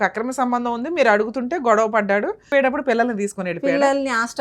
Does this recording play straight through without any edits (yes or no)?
no